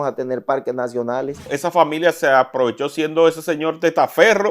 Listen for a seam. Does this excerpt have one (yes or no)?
yes